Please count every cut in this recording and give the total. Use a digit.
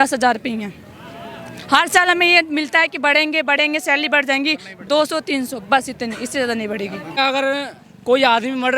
1